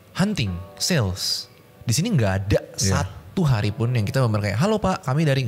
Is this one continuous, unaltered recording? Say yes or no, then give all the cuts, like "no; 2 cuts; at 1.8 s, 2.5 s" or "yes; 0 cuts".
yes; 0 cuts